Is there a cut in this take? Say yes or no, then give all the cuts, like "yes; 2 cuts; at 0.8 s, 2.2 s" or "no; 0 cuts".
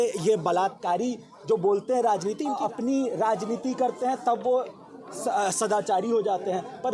yes; 1 cut; at 2.5 s